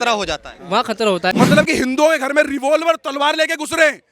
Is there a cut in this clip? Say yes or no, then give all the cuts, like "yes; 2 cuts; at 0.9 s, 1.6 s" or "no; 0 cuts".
yes; 1 cut; at 1.3 s